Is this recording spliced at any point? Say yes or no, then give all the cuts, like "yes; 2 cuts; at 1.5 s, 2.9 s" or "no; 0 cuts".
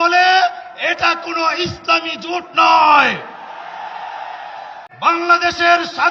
yes; 1 cut; at 5.1 s